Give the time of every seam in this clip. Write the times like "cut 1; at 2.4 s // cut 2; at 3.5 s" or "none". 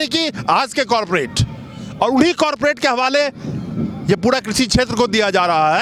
none